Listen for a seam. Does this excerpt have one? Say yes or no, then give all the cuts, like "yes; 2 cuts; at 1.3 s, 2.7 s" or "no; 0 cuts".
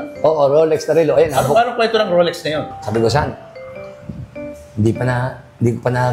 yes; 1 cut; at 2.6 s